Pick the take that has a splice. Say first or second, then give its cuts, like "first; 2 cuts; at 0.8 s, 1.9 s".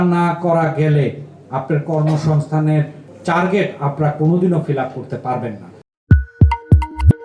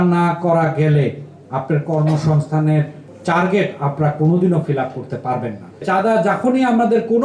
second; 1 cut; at 5.8 s